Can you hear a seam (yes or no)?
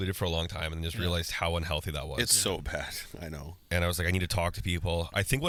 no